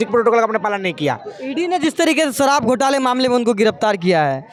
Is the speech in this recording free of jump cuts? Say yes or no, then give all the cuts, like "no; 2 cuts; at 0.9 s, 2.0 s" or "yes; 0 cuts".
yes; 0 cuts